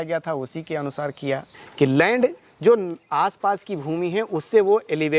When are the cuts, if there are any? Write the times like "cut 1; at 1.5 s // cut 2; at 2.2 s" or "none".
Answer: cut 1; at 1.5 s

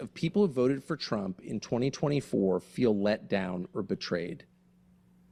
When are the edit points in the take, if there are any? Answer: none

